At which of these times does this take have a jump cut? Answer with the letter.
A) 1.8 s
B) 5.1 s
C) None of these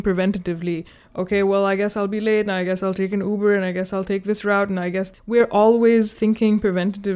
B